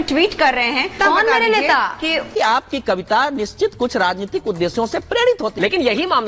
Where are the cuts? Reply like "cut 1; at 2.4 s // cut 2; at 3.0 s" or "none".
cut 1; at 1.0 s // cut 2; at 2.3 s